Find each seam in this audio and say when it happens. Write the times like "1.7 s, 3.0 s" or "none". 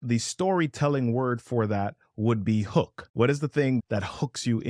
none